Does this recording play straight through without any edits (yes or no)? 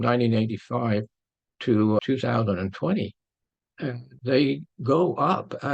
no